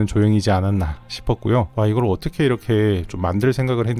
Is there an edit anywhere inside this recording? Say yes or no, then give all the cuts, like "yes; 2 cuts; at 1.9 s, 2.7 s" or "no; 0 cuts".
yes; 1 cut; at 1.7 s